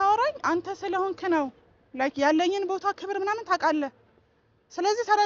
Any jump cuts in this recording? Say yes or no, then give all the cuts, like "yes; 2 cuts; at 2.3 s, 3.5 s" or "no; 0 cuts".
no; 0 cuts